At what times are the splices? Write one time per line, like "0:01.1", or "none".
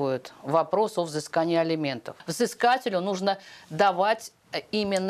0:02.2